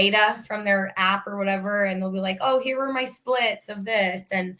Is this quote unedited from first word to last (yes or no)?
yes